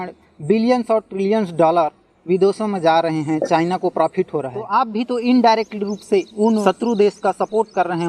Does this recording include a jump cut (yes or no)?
yes